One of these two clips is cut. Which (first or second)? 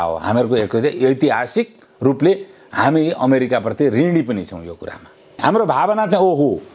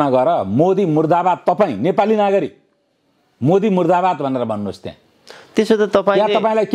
first